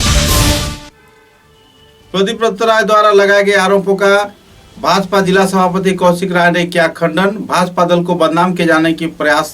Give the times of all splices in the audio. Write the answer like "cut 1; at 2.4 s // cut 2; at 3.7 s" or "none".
cut 1; at 0.9 s